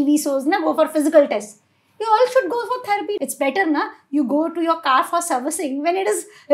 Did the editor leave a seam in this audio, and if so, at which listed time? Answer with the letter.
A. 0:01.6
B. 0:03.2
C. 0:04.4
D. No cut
B